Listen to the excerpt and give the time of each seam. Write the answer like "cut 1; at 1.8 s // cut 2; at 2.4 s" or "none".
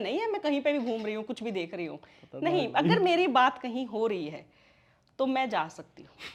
none